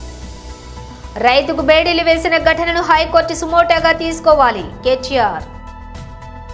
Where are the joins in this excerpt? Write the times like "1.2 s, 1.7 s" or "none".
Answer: 1.0 s, 5.4 s